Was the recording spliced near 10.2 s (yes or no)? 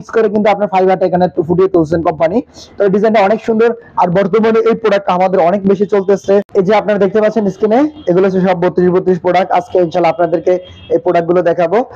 no